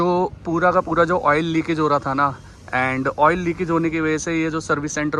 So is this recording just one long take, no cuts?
yes; 0 cuts

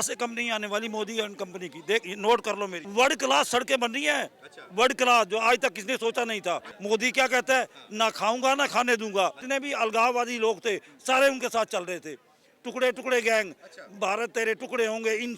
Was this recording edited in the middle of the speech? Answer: yes; 3 cuts; at 2.8 s, 6.7 s, 9.4 s

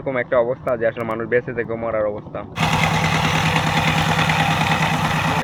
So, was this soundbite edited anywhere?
no; 0 cuts

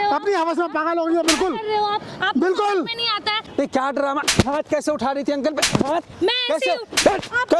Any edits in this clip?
yes; 1 cut; at 3.5 s

